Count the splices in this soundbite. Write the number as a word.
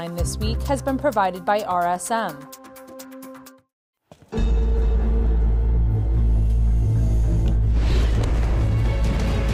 two